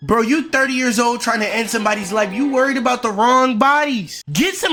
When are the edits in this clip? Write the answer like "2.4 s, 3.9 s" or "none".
none